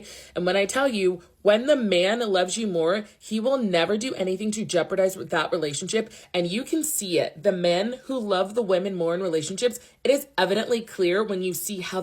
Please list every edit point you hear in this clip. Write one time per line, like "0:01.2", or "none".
0:02.8